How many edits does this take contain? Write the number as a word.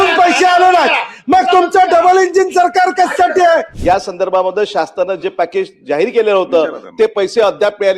one